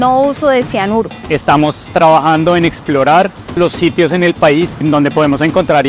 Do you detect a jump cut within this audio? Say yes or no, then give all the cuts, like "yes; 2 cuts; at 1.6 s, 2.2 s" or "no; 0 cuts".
yes; 3 cuts; at 1.2 s, 3.6 s, 4.8 s